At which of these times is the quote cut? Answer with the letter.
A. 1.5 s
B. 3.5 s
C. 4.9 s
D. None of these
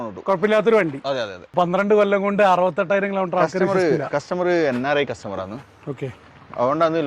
A